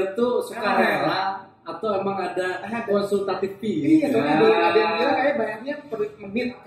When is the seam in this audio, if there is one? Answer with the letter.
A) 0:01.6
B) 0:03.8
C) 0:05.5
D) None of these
D